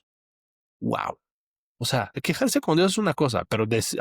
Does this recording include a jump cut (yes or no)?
yes